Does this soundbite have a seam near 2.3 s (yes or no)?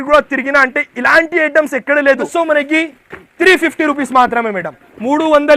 yes